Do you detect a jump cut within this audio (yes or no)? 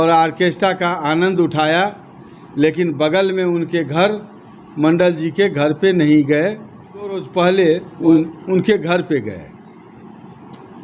yes